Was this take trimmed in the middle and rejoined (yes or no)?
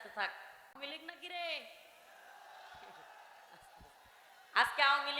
yes